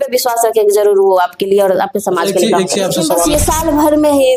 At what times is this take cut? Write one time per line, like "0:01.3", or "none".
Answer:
0:03.3